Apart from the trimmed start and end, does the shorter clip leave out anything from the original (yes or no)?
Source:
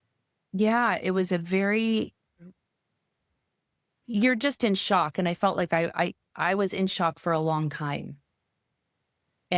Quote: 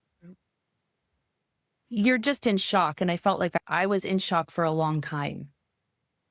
yes